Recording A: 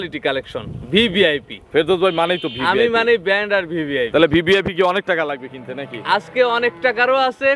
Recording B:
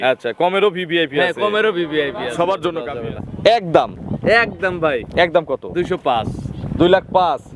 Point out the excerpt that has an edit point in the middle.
B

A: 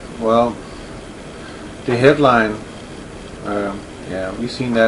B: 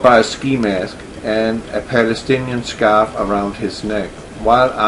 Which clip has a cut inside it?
B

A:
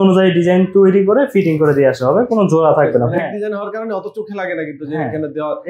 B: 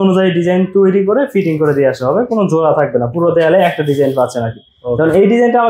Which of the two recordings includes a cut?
A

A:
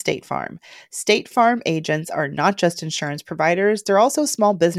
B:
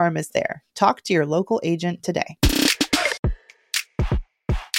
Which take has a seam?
B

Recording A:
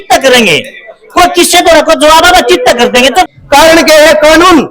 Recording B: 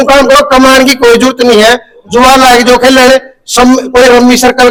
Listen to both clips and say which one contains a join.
A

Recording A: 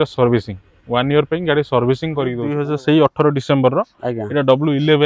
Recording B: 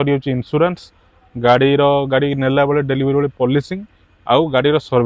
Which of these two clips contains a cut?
A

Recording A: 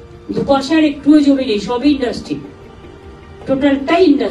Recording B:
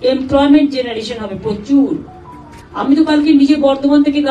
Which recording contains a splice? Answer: B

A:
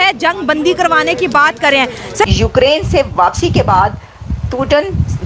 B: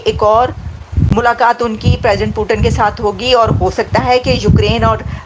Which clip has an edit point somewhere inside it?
A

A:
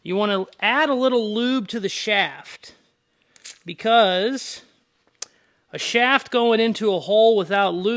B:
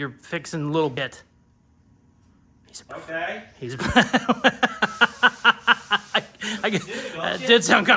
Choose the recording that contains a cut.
B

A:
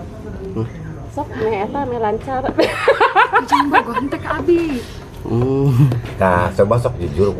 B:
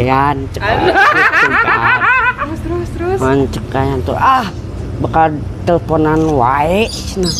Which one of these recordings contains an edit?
A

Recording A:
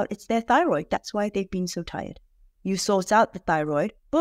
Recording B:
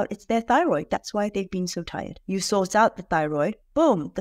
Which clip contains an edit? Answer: B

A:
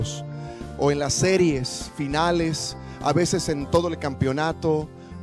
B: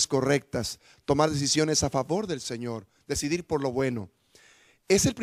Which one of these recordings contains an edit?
A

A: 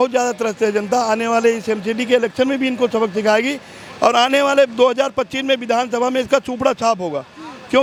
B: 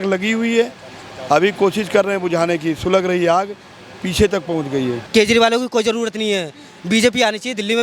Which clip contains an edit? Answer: B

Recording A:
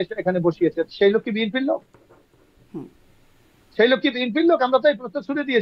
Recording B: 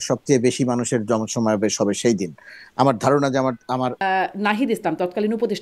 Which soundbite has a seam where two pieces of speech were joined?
B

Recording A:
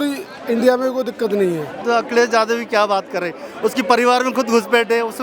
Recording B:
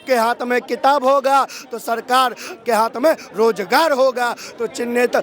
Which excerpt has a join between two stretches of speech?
A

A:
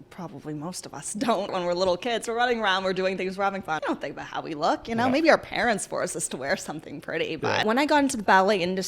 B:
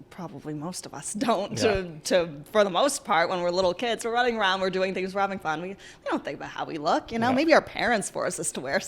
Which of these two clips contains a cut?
A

